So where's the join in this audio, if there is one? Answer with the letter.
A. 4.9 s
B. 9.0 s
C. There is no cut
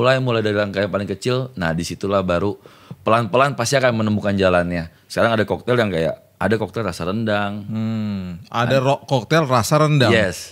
A